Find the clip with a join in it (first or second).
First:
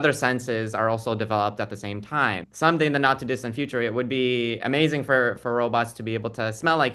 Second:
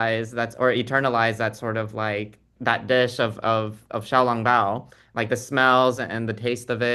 first